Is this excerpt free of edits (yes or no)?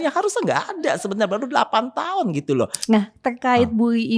no